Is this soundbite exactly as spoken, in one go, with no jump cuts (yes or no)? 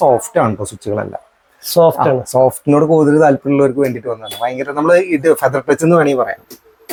yes